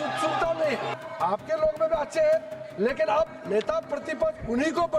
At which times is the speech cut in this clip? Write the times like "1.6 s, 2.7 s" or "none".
0.9 s